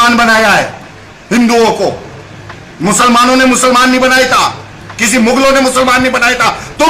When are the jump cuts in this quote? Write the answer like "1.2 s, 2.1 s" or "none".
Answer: none